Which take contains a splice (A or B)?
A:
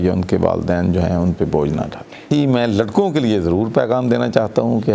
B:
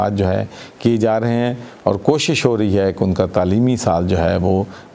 A